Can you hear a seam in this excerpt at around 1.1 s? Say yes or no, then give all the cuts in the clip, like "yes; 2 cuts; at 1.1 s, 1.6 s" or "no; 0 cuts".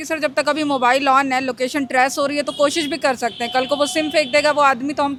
no; 0 cuts